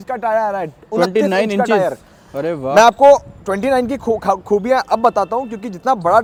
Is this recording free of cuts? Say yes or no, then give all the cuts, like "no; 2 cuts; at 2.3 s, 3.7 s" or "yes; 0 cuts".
yes; 0 cuts